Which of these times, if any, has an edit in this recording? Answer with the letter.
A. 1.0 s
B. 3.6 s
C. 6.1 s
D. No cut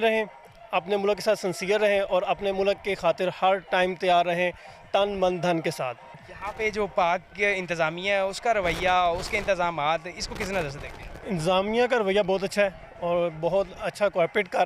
C